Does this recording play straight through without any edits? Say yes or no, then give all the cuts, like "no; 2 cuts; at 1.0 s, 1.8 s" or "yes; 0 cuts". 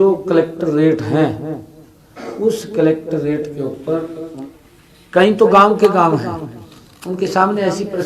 no; 1 cut; at 4.2 s